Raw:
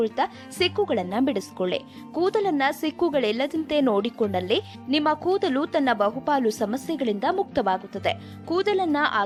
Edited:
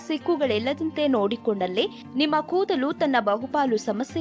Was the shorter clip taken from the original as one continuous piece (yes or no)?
yes